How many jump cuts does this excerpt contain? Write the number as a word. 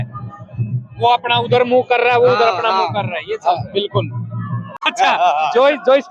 one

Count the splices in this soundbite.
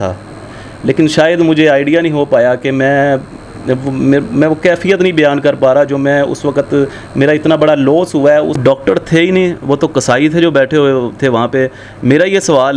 one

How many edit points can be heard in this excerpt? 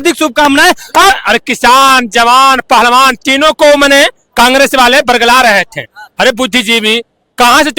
one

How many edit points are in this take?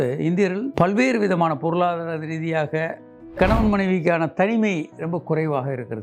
one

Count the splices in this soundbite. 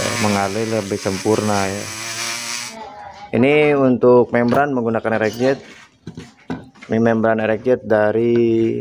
one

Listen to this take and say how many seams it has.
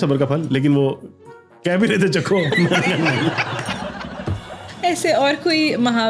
zero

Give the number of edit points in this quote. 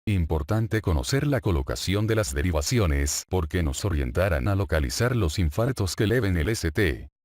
one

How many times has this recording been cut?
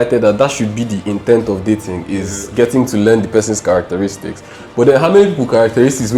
zero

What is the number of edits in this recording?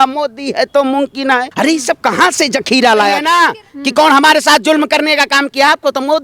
two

